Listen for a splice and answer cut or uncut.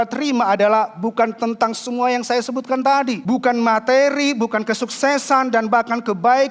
cut